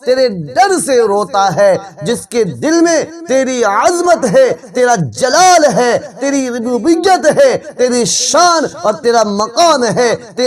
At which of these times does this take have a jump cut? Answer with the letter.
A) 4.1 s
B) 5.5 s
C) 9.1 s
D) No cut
D